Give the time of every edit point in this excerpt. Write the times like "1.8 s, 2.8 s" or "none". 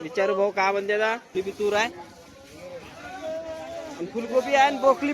1.3 s